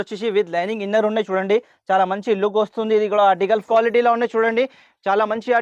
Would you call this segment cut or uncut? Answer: cut